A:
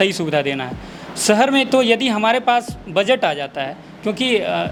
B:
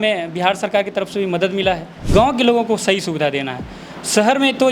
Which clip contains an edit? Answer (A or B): B